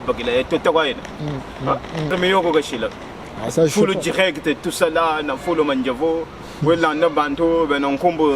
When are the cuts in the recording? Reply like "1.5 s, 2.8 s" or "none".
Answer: none

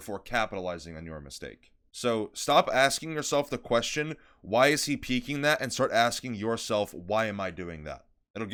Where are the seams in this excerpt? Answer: none

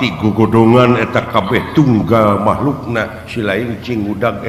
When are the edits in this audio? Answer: none

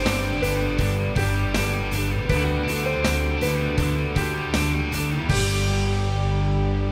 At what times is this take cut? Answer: none

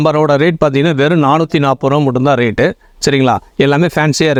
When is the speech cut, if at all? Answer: none

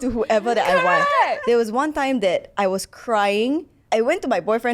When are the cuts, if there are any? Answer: 1.4 s, 3.7 s

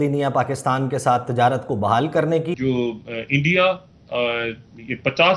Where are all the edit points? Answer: 2.5 s

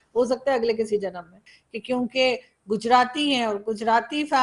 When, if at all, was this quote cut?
1.3 s

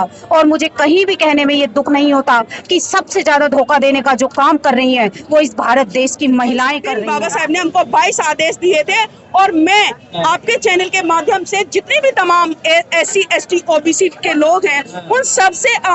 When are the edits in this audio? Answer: 6.9 s

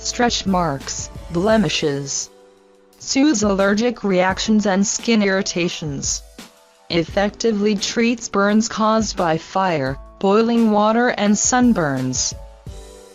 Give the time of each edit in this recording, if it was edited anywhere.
none

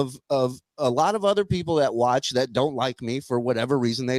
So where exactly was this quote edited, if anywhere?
none

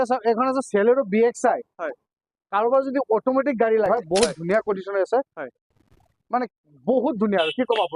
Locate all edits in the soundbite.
3.9 s

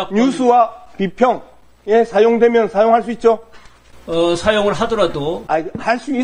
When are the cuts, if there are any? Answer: none

